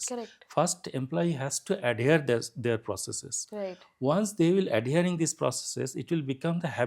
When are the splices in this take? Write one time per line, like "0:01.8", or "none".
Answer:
none

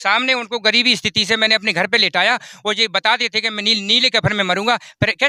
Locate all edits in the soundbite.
none

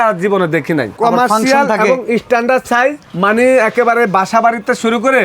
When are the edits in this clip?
0:00.9

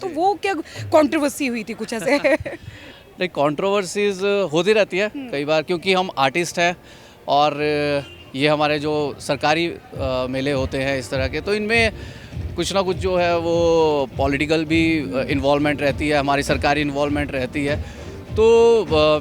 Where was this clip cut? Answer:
none

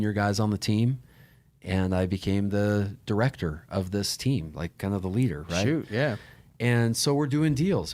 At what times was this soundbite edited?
none

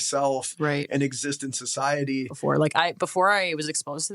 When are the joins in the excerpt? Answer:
0:02.3

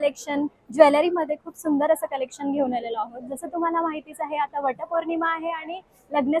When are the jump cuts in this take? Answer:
none

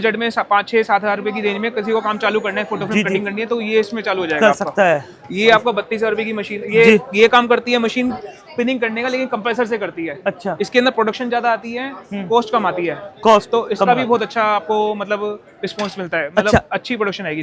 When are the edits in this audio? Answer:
none

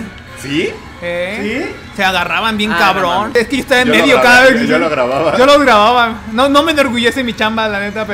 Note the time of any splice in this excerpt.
0:03.3

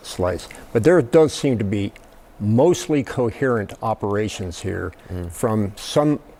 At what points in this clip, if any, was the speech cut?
none

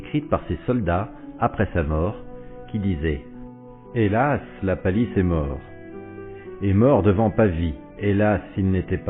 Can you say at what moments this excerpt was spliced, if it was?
0:03.1

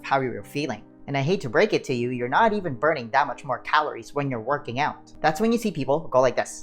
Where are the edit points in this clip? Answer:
0:00.9
0:05.1

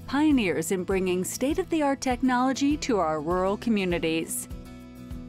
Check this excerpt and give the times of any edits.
0:04.3

